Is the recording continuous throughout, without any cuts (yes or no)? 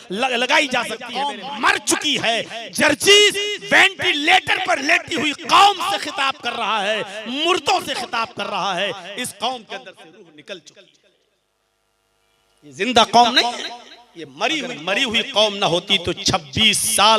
no